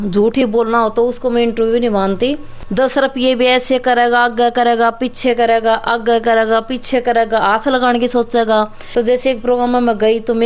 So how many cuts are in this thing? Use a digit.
2